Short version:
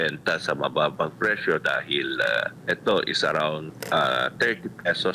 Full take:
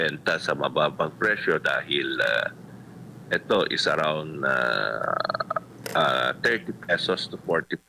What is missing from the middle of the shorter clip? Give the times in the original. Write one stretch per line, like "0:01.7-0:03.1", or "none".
0:02.5-0:03.2
0:04.3-0:05.7